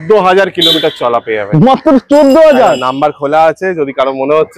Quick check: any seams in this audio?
no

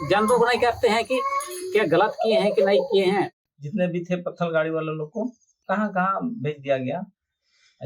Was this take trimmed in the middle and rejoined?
yes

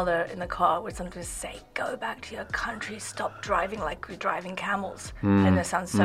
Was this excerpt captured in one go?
yes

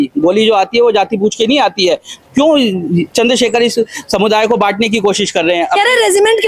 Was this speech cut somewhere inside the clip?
no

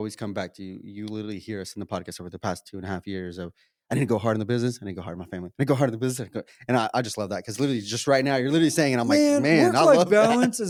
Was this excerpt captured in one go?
yes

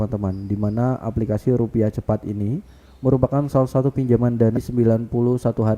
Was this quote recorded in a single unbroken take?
no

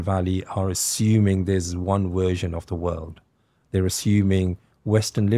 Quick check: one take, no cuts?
yes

